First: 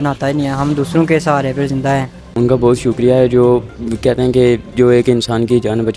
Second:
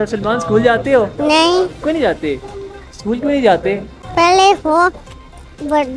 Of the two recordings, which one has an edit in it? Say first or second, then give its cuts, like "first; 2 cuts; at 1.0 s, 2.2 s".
first; 1 cut; at 2.2 s